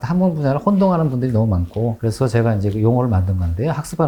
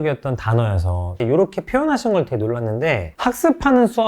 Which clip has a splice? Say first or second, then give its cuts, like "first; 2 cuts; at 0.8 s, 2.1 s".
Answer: second; 1 cut; at 1.2 s